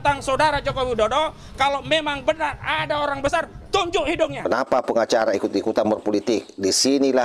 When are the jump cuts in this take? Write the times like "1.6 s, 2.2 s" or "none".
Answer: 4.4 s